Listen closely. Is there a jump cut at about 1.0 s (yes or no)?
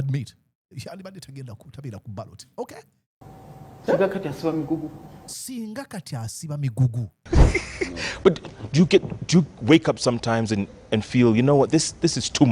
no